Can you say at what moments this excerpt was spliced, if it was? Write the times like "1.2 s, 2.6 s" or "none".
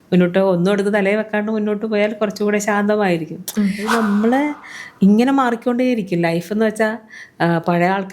3.9 s